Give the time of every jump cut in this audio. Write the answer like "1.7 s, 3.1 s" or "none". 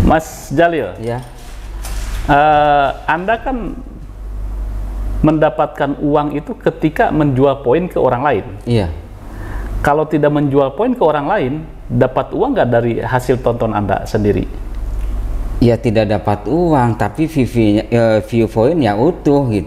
none